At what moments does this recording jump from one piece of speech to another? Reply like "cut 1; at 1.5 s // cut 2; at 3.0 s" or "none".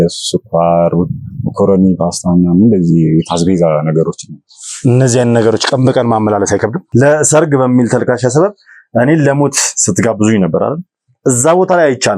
cut 1; at 6.8 s